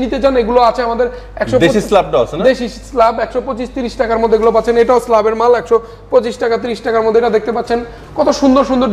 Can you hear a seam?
no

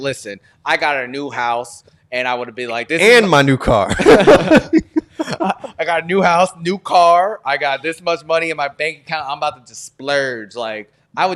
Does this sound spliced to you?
no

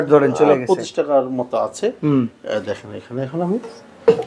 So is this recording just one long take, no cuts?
yes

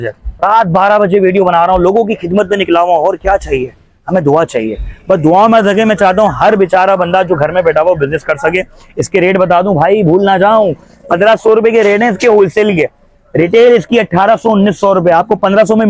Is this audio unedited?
yes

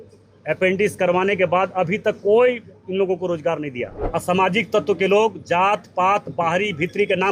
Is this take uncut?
no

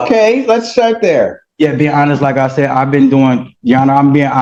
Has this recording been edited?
no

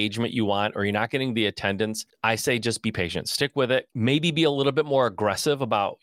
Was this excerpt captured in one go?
no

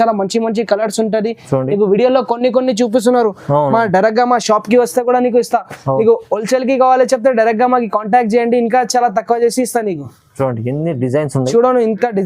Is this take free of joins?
yes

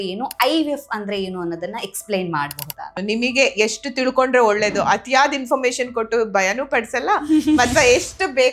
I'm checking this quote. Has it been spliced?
yes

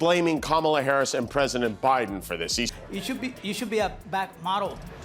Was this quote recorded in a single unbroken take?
no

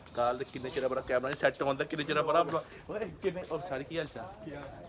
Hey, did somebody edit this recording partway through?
no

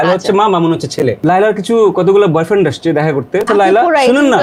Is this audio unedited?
no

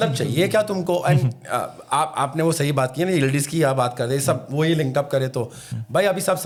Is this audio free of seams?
yes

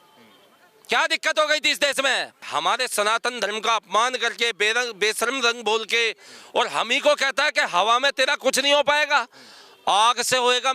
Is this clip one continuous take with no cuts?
no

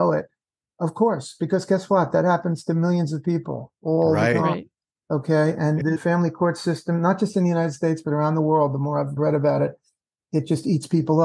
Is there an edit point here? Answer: yes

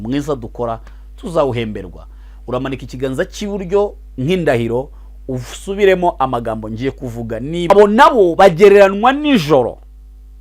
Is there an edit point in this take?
yes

